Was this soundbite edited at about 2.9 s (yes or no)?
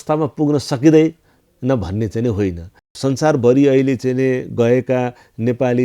yes